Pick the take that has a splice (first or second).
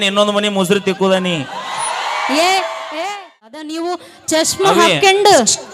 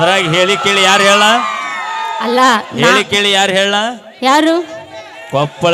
first